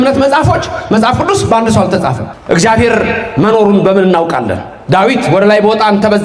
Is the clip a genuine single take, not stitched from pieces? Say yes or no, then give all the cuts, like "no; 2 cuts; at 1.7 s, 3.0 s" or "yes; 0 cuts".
no; 1 cut; at 2.3 s